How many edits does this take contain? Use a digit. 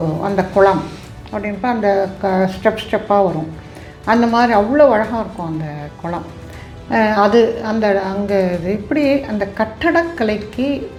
0